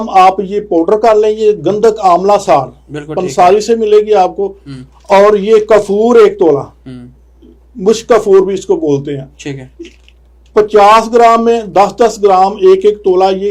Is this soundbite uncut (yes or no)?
yes